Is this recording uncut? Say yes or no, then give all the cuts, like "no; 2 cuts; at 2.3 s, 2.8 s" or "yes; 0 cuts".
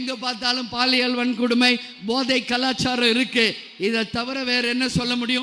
yes; 0 cuts